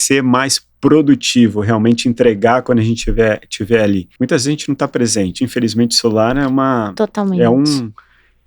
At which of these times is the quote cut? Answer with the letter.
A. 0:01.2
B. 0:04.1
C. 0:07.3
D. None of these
B